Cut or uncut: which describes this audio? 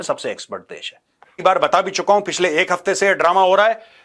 cut